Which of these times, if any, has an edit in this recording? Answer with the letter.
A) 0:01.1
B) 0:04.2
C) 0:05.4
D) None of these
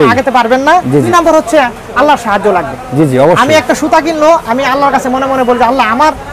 A